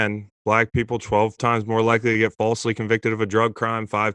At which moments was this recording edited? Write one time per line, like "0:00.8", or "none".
0:01.4